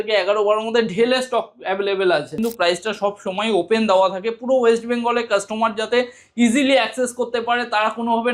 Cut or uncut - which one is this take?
cut